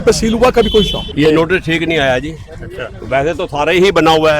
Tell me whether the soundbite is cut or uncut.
cut